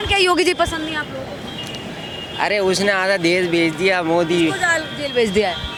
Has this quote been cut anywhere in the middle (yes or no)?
no